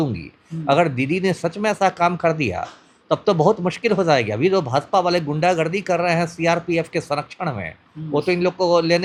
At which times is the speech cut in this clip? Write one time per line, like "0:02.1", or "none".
none